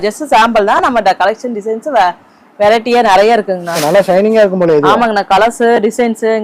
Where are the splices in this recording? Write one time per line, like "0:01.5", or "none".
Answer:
0:03.7